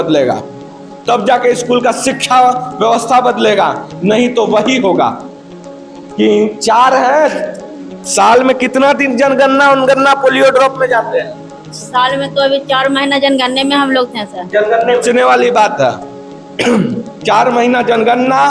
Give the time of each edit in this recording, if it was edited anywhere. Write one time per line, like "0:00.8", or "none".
0:15.0